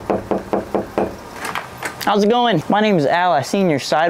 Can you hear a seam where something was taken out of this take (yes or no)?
yes